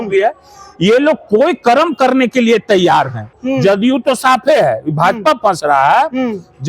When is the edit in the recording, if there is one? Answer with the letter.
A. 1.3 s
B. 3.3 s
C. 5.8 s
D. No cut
B